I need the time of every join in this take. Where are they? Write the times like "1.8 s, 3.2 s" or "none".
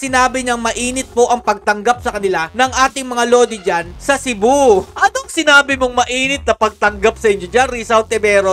4.9 s